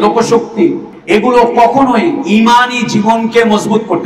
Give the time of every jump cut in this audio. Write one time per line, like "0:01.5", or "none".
0:00.9